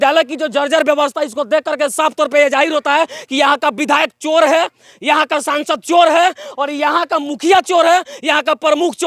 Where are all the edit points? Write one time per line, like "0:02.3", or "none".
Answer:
none